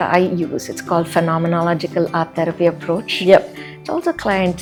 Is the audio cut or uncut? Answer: uncut